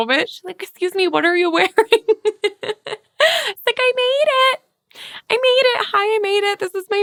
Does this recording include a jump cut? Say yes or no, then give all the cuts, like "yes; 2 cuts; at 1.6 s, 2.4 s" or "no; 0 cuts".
no; 0 cuts